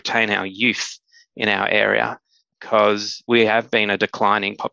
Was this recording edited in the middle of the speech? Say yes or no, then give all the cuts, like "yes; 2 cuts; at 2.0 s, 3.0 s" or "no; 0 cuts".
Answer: yes; 1 cut; at 3.3 s